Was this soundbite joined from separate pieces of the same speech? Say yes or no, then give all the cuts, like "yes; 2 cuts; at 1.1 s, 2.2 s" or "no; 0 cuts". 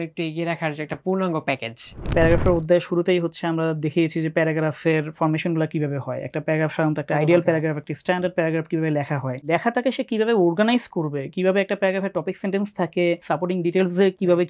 yes; 3 cuts; at 2.1 s, 9.5 s, 13.2 s